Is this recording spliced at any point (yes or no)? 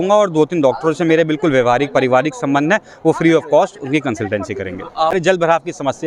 yes